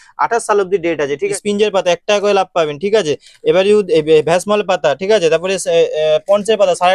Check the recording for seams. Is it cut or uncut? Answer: cut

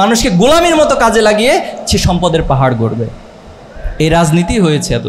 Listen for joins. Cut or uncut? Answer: uncut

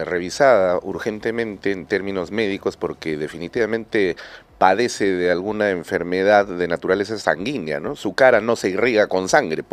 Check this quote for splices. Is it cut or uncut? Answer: uncut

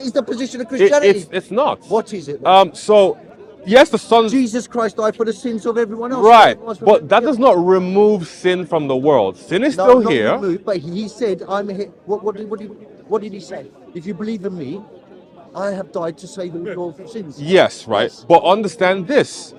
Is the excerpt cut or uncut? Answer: uncut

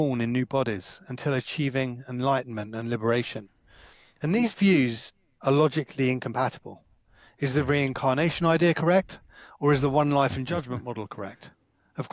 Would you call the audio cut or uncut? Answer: uncut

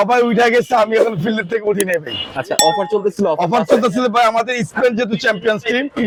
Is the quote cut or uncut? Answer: uncut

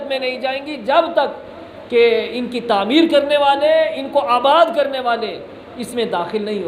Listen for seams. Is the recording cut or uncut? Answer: uncut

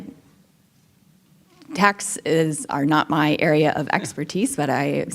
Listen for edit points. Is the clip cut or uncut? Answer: uncut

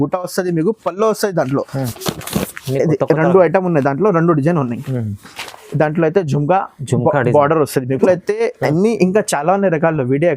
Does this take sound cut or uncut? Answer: cut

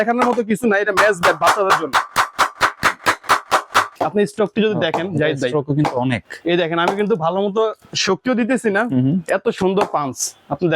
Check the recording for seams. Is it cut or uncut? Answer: cut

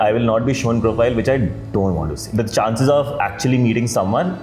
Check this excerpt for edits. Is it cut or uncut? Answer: cut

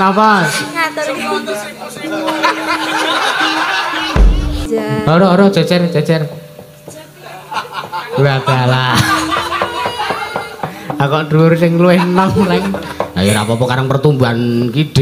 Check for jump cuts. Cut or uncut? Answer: cut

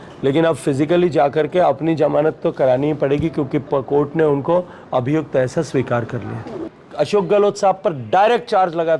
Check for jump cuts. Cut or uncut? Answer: cut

